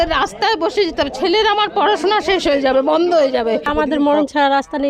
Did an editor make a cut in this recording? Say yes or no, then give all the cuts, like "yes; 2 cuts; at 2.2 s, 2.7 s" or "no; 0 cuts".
yes; 1 cut; at 3.7 s